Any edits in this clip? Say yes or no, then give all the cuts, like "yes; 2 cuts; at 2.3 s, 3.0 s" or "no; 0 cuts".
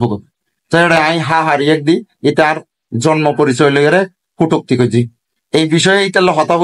no; 0 cuts